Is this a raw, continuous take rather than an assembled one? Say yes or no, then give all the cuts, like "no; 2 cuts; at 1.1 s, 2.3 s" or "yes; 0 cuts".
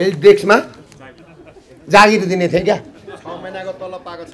yes; 0 cuts